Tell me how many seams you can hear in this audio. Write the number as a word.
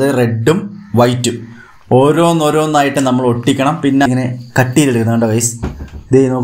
one